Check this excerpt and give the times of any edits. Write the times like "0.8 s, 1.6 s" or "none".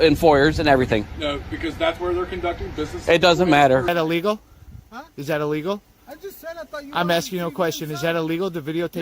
3.9 s

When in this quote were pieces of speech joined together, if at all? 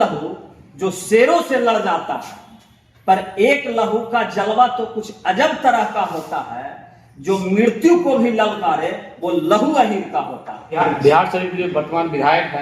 10.8 s

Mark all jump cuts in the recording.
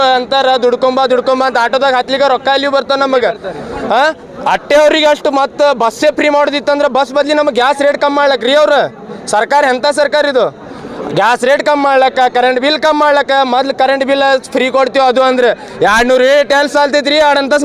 none

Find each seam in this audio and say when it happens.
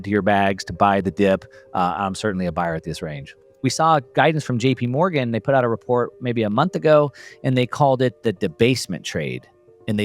3.5 s

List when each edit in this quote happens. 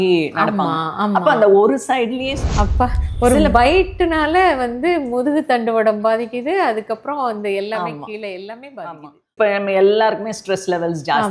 2.4 s, 9.2 s

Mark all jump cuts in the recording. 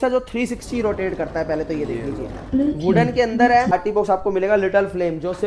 3.7 s

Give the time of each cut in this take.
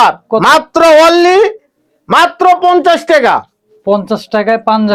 none

